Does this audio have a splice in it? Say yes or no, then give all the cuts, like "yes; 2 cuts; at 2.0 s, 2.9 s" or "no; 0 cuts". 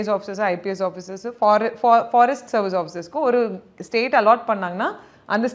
no; 0 cuts